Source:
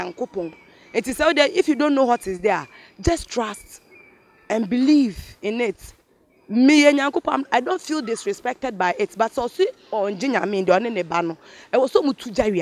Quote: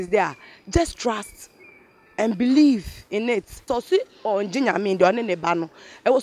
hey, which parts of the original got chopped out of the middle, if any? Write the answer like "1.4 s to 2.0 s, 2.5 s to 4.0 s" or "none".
6.0 s to 9.3 s

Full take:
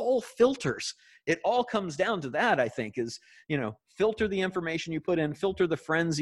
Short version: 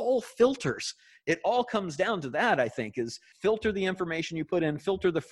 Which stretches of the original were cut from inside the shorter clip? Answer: 3.3 s to 3.8 s

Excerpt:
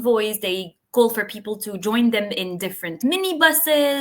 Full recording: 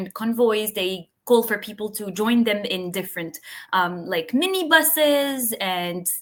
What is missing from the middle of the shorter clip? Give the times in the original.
3.3 s to 4.3 s

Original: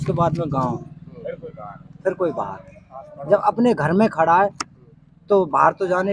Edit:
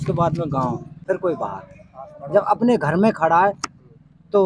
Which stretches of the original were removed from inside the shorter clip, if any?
0.9 s to 1.9 s

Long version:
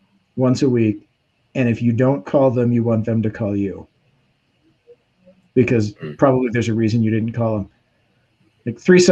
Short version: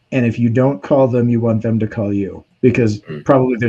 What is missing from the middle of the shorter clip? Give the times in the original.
3.9 s to 5.4 s

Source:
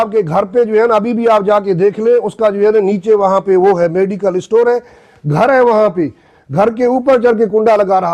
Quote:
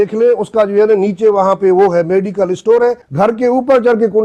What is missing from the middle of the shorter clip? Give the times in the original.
4.9 s to 6.4 s

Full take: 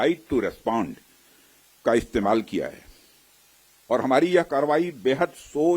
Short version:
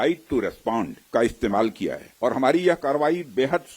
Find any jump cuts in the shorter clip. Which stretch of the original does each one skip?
1.0 s to 1.7 s, 2.8 s to 3.7 s

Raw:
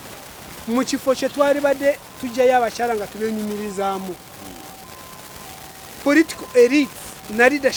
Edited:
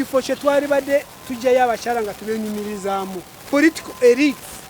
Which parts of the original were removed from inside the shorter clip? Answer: 4.3 s to 5.9 s

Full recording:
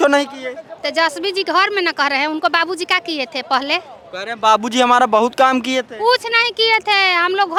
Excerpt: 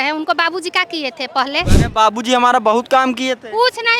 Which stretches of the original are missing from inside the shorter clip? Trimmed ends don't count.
3.9 s to 4.2 s

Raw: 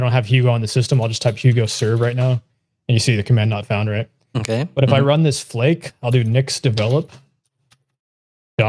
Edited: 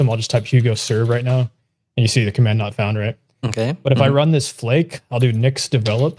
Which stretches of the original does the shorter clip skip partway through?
none

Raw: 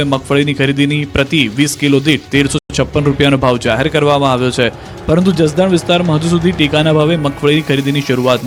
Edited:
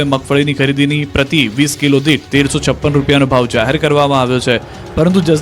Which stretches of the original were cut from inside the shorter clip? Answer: 2.6 s to 2.7 s

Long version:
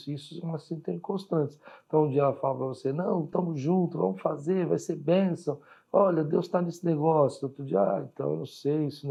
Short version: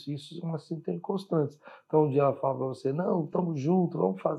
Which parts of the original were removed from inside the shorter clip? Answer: none

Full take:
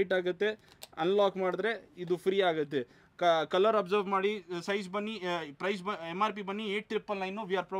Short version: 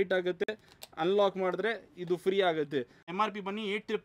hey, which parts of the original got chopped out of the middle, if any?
3.0 s to 6.0 s

